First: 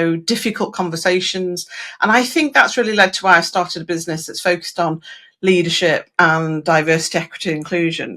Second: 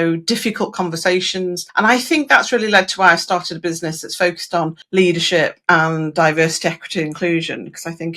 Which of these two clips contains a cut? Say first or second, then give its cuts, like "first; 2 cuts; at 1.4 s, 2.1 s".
second; 2 cuts; at 1.6 s, 4.8 s